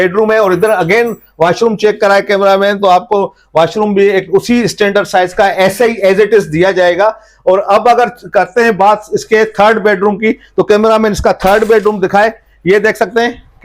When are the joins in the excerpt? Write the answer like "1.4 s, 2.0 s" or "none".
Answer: none